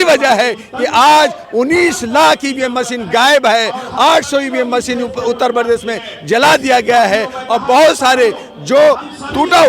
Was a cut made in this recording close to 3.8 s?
no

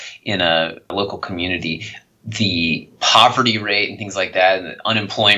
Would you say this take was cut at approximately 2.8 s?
no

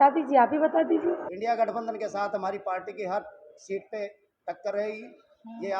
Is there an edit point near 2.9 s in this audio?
no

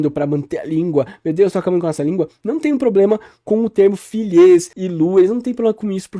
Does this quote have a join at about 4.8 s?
yes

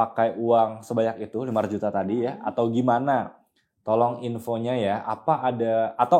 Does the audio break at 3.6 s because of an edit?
no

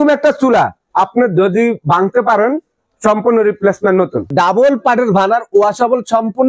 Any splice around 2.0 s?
no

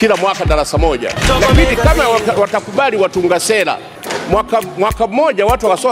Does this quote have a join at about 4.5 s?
no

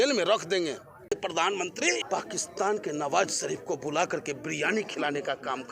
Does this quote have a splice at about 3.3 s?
no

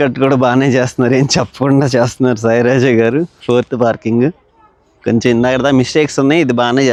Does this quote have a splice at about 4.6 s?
no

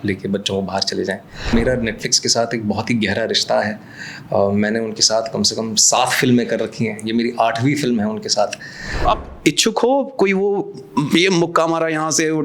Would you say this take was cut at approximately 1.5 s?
yes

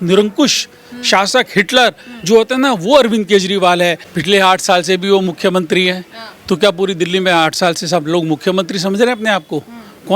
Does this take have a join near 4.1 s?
yes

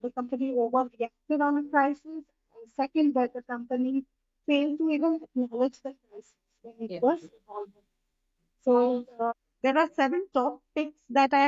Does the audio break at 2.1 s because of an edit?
no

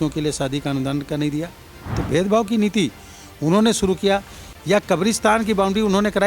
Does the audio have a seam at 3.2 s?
no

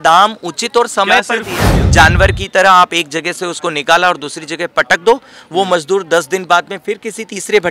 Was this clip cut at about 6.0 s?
no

